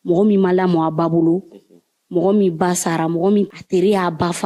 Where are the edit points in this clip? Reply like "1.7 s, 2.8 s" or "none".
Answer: 3.5 s